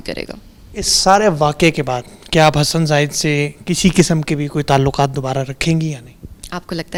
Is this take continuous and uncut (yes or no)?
yes